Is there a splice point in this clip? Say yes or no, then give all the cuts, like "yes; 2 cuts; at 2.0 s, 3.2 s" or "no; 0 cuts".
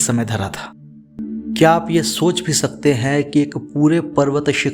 yes; 1 cut; at 1.1 s